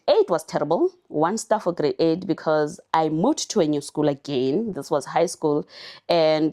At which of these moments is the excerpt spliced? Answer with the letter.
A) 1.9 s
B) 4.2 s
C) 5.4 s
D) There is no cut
D